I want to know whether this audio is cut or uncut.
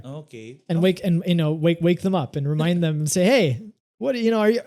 uncut